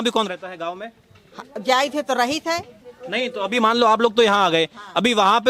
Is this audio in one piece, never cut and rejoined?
yes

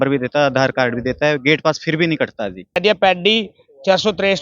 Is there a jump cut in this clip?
yes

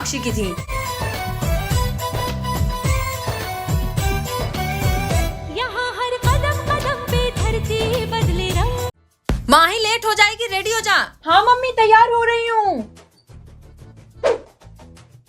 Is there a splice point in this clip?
yes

